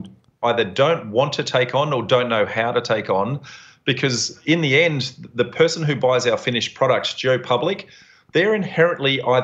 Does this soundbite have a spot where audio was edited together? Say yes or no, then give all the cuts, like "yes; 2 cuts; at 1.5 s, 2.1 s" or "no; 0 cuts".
no; 0 cuts